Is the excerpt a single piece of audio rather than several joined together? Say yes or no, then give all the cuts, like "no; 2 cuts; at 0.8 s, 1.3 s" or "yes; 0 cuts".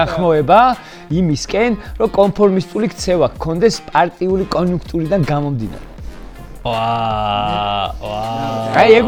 yes; 0 cuts